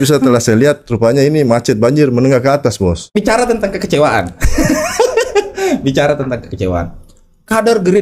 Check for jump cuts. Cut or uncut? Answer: cut